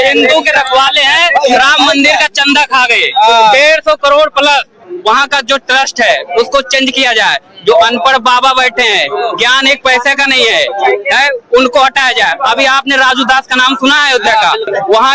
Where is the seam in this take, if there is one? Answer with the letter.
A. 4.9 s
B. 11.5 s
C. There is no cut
A